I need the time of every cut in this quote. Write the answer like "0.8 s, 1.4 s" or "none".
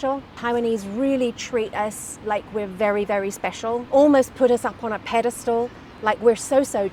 none